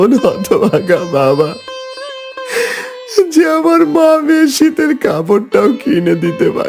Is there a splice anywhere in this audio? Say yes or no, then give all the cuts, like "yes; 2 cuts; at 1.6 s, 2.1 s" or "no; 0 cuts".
no; 0 cuts